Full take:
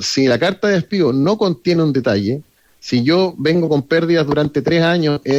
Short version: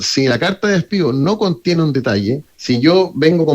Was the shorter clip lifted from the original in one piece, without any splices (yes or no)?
no